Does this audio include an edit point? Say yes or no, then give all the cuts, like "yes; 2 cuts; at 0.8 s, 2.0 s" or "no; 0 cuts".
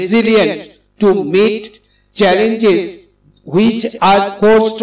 no; 0 cuts